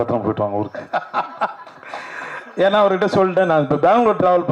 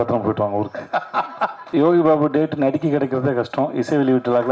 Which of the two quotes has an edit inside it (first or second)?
second